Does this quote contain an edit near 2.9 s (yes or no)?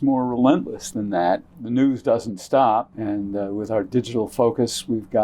yes